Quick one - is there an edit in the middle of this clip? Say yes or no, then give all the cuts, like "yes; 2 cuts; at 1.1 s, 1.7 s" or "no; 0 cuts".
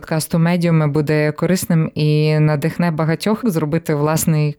yes; 1 cut; at 3.4 s